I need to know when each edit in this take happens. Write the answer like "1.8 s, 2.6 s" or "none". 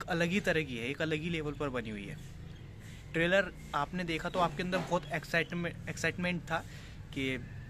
none